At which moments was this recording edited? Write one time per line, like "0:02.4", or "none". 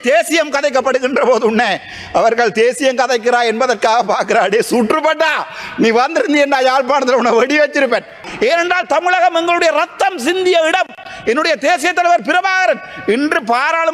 0:08.2